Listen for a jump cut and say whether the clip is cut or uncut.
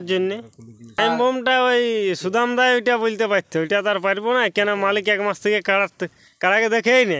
cut